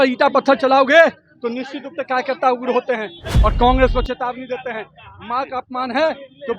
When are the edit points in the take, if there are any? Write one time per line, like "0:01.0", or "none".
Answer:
0:03.3